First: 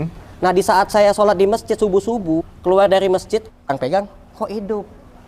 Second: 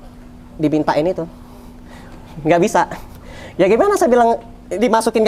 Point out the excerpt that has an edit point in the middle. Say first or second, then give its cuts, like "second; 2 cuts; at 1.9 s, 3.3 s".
first; 2 cuts; at 2.5 s, 3.6 s